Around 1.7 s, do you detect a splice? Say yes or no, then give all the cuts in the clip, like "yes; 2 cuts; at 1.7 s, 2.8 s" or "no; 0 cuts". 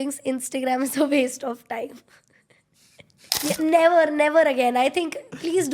no; 1 cut; at 3.3 s